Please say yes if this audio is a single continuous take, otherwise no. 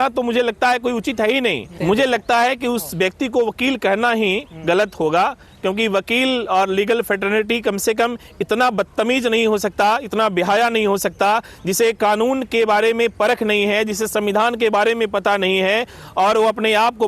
no